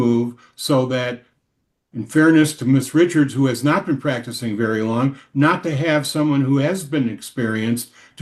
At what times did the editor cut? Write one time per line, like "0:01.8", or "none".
none